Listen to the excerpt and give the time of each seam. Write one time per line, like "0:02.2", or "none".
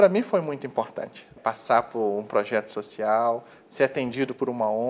0:01.3